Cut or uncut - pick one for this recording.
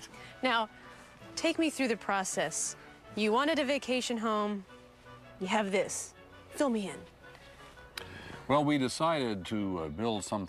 cut